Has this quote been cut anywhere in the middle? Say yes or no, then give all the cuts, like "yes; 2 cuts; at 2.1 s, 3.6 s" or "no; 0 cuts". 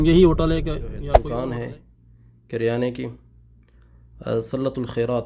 yes; 1 cut; at 1.1 s